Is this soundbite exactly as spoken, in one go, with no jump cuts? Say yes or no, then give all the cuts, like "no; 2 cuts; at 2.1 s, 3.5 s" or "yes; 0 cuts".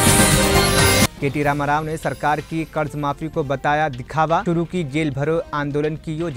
no; 1 cut; at 1.1 s